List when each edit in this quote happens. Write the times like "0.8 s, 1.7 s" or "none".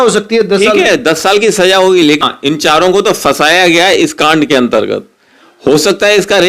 2.2 s